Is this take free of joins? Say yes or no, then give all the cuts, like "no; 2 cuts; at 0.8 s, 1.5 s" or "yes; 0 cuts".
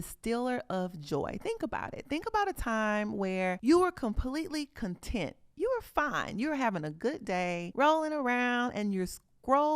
no; 2 cuts; at 3.6 s, 7.7 s